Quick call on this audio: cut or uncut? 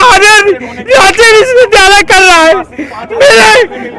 uncut